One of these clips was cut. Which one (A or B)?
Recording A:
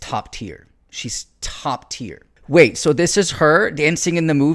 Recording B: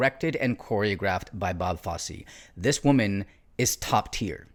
A